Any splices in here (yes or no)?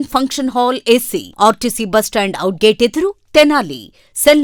no